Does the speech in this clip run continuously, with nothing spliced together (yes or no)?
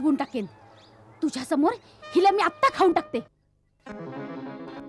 no